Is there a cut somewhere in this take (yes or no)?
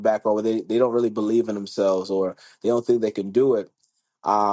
no